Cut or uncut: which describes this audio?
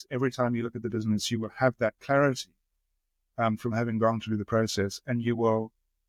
uncut